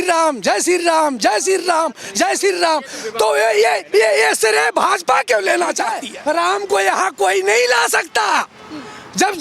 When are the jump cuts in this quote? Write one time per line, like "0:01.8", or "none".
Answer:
0:06.0